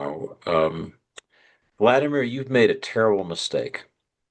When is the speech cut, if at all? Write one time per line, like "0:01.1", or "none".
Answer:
none